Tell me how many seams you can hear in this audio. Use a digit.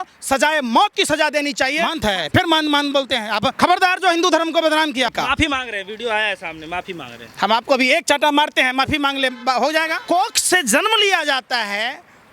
4